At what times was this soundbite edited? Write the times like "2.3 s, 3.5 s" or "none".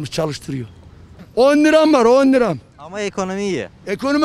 1.2 s